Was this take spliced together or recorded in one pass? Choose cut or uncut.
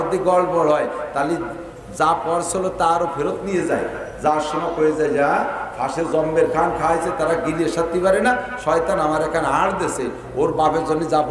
uncut